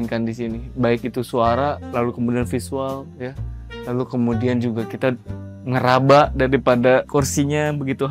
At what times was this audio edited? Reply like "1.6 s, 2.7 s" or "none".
none